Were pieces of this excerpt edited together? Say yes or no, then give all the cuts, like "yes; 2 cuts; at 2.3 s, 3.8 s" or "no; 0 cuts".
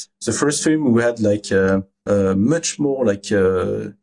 yes; 1 cut; at 1.9 s